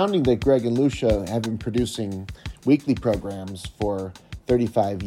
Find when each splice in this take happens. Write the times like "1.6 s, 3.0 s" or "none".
none